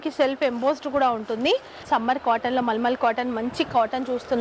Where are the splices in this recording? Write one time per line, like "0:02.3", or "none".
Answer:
0:01.8